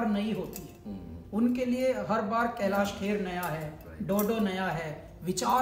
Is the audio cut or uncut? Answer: uncut